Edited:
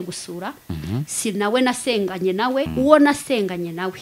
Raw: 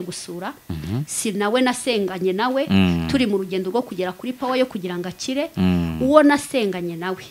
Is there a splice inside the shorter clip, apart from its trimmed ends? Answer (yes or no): yes